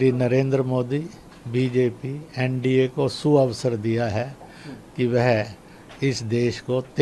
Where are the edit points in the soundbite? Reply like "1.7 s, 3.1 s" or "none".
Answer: none